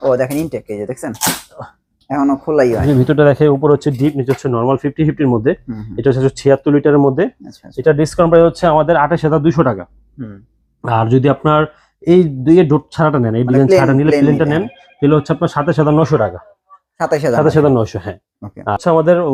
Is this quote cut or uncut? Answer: uncut